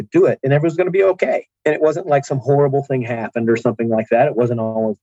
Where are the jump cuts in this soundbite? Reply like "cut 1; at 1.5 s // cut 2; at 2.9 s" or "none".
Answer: cut 1; at 1.5 s